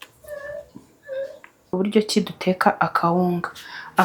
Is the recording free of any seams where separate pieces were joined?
no; 1 cut; at 1.7 s

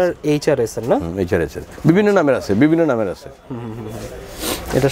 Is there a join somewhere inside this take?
no; 0 cuts

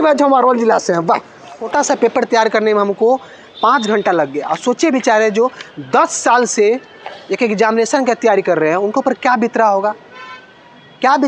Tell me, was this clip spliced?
no; 0 cuts

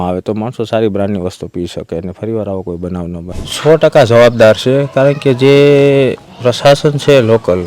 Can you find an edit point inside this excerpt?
yes; 1 cut; at 3.3 s

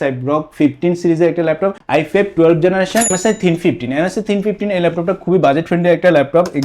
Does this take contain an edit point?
yes; 2 cuts; at 1.8 s, 3.1 s

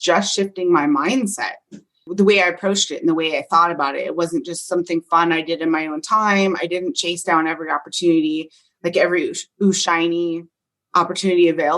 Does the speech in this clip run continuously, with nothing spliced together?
no; 1 cut; at 2.0 s

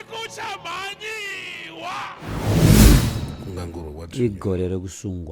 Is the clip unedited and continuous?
no; 2 cuts; at 2.2 s, 3.0 s

